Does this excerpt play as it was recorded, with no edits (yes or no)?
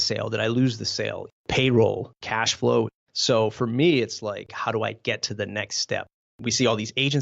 no